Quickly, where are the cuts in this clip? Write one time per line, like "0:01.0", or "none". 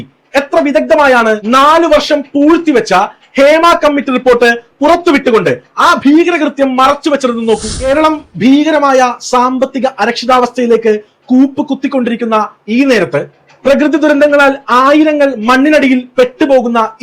0:07.7